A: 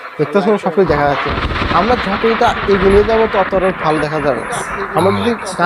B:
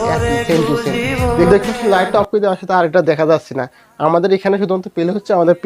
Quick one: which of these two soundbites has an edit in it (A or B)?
B